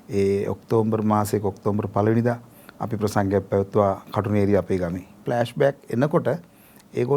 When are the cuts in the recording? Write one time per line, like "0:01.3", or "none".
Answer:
0:05.2

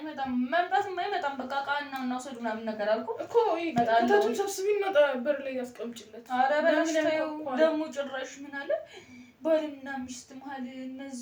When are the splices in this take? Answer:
none

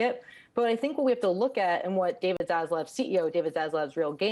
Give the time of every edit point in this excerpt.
0:02.4

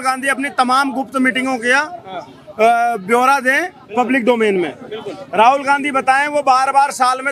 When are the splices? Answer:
none

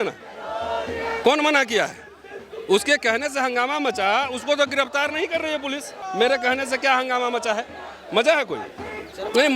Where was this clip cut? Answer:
0:05.9

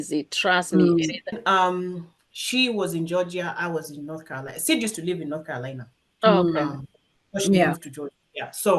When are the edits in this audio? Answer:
0:01.2

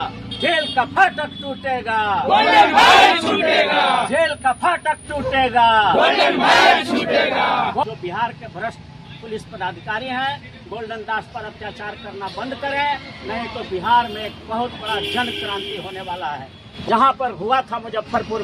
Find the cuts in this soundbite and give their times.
0:07.8
0:16.8

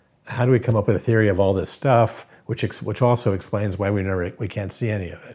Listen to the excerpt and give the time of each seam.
none

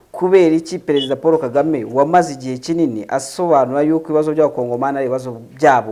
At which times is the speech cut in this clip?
none

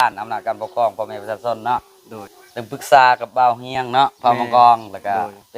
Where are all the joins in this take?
0:02.2

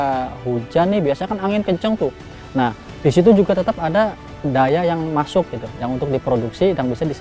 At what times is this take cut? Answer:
0:04.3

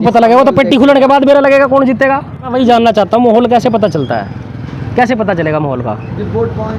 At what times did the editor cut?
0:02.5

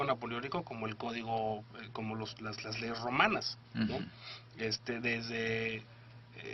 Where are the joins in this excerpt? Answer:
0:01.8

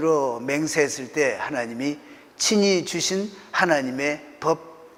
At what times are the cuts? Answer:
none

